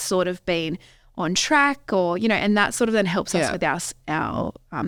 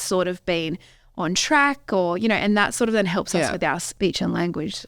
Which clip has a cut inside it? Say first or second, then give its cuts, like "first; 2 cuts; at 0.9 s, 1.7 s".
second; 1 cut; at 3.9 s